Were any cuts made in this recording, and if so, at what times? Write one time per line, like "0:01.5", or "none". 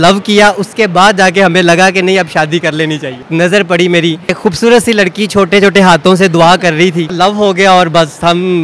0:03.2
0:04.4
0:07.1